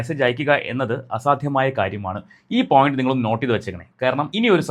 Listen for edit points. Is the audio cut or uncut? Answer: uncut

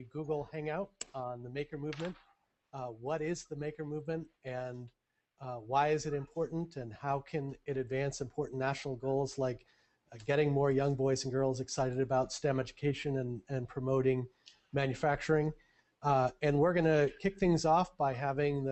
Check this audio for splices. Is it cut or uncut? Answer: uncut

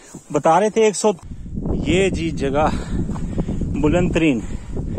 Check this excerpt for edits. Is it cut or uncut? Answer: cut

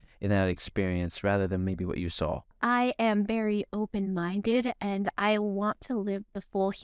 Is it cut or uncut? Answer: cut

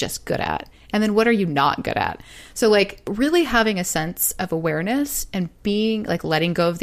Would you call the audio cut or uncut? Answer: uncut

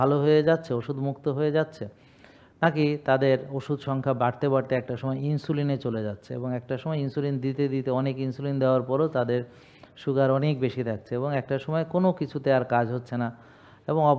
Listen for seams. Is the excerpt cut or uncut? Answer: uncut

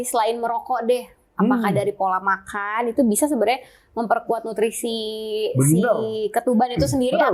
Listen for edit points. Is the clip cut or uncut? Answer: uncut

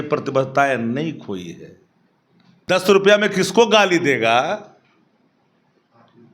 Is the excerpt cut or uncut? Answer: cut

